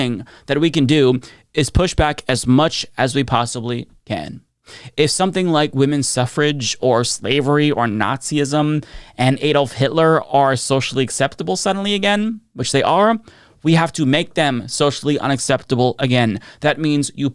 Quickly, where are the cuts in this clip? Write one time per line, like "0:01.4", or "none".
none